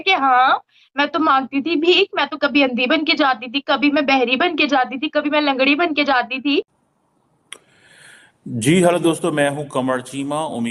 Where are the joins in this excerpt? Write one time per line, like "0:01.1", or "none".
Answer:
0:06.8

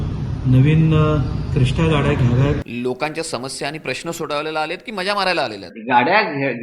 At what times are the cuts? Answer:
0:02.7
0:05.7

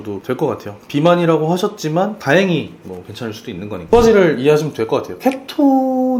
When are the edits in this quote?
0:03.9

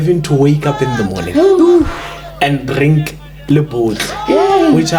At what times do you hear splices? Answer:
none

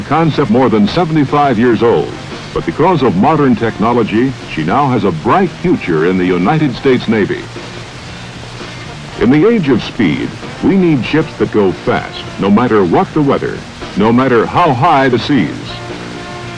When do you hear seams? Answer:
0:10.1

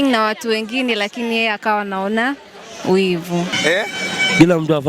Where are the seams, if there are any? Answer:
0:03.5

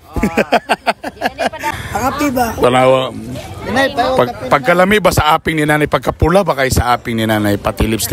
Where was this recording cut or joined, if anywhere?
0:01.7

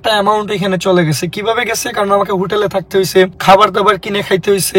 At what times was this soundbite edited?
0:03.4

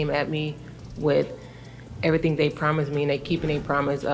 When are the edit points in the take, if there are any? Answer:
none

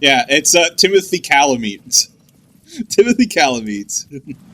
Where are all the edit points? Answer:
none

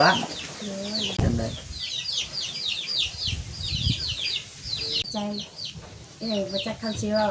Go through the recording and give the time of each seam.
0:01.2
0:05.0

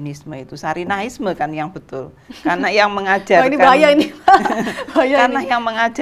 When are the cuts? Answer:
none

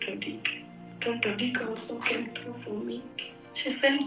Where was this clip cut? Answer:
0:03.2

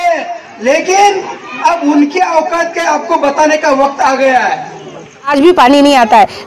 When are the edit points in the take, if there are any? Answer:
0:05.3

